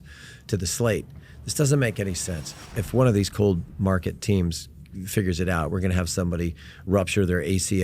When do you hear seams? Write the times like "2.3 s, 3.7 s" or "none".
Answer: 2.7 s